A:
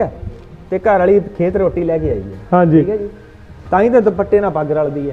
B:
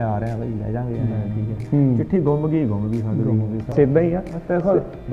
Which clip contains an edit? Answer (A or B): B